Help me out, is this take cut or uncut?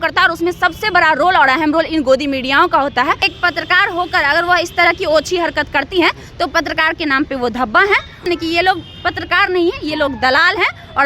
cut